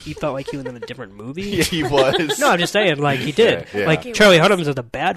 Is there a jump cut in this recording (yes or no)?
no